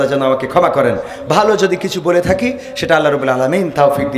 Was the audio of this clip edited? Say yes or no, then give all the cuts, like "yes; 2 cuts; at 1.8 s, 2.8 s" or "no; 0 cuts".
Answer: no; 0 cuts